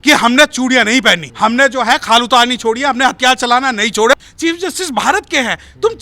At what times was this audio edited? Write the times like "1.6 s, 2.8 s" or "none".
1.3 s, 4.1 s